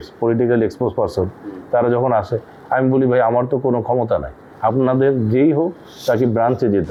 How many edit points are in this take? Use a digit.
0